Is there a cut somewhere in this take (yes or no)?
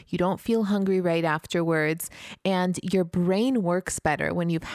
yes